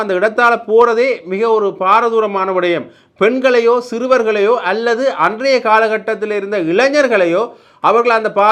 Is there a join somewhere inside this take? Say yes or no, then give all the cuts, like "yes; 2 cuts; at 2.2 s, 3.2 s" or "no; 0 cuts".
no; 0 cuts